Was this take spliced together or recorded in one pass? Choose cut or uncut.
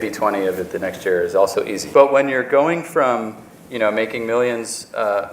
cut